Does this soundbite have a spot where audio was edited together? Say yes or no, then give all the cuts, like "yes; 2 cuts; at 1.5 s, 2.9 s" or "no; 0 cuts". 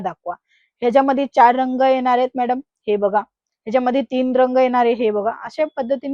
no; 0 cuts